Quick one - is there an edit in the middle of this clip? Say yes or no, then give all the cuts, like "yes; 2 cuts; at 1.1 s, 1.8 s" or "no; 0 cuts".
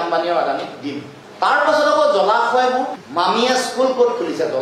yes; 2 cuts; at 1.2 s, 3.0 s